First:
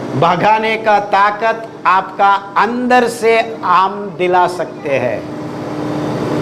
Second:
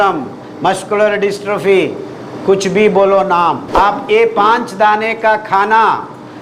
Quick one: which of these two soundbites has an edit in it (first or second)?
second